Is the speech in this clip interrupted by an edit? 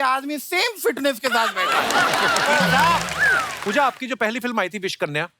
yes; 1 cut; at 3.5 s

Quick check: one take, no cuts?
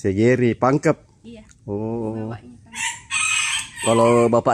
yes; 0 cuts

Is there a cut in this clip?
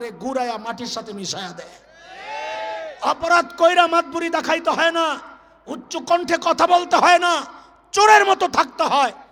no; 0 cuts

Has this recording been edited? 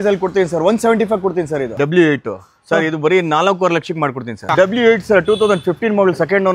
yes; 2 cuts; at 1.8 s, 4.4 s

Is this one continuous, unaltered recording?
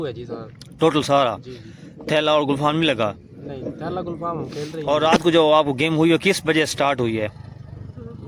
no; 1 cut; at 4.8 s

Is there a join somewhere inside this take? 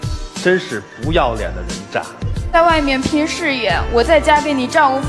yes; 1 cut; at 2.5 s

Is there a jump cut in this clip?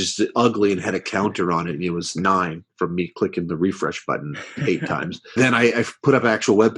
yes; 1 cut; at 5.3 s

